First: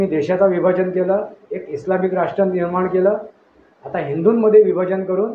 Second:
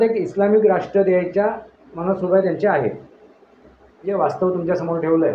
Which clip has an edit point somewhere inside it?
second; 1 cut; at 4.0 s

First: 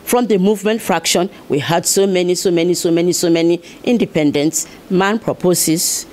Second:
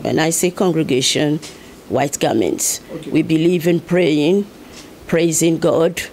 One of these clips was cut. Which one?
first; 1 cut; at 4.7 s

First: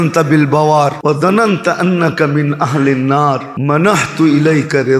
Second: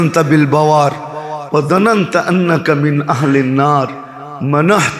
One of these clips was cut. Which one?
first; 2 cuts; at 1.0 s, 3.5 s

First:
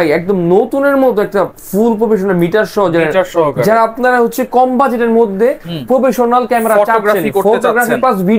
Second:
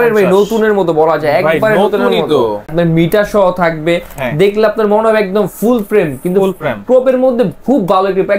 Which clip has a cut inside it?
second; 1 cut; at 2.7 s

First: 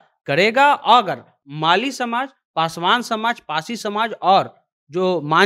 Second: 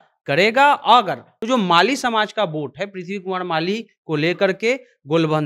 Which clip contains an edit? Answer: second; 1 cut; at 1.3 s

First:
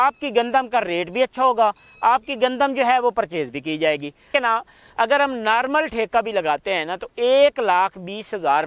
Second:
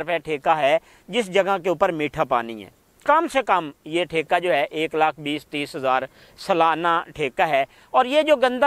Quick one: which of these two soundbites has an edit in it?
first; 1 cut; at 4.3 s

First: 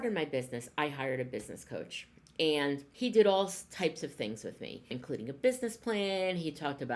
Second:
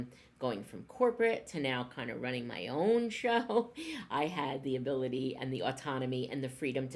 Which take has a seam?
first; 2 cuts; at 2.9 s, 4.9 s

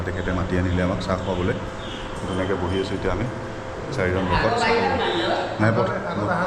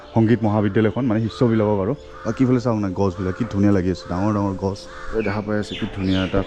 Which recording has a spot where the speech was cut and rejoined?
second; 1 cut; at 4.9 s

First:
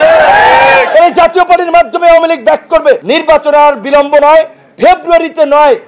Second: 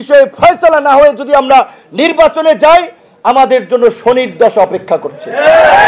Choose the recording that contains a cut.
first; 1 cut; at 3.0 s

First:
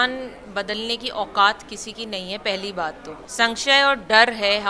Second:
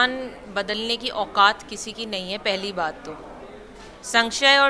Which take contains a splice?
first; 1 cut; at 3.2 s

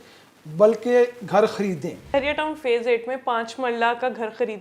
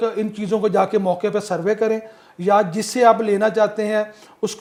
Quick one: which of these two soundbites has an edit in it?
first; 1 cut; at 2.1 s

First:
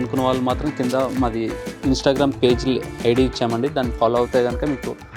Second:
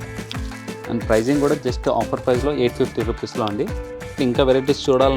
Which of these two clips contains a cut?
second; 1 cut; at 4.2 s

